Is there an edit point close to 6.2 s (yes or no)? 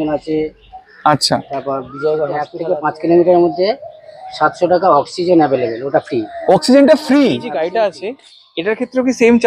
no